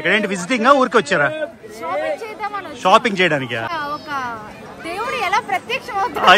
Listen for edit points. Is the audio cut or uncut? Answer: cut